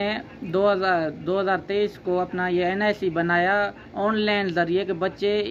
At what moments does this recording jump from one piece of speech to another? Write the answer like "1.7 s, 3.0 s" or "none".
none